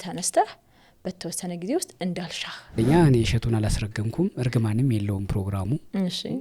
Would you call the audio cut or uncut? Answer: cut